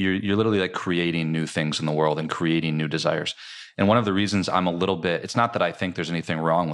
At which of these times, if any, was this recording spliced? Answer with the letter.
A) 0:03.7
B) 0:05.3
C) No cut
C